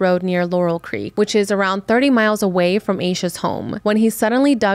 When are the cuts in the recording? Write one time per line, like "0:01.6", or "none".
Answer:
0:01.0
0:03.7